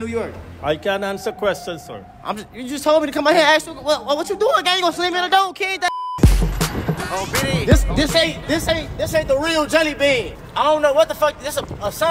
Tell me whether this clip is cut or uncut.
cut